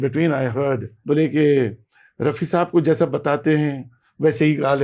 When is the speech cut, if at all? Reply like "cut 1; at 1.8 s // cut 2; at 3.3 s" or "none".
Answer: cut 1; at 0.9 s